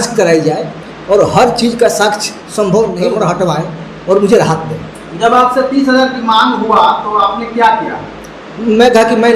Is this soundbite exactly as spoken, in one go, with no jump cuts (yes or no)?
no